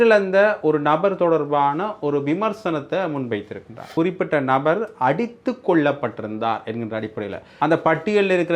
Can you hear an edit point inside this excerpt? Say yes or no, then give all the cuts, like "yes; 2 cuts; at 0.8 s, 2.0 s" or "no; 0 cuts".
yes; 2 cuts; at 3.9 s, 7.4 s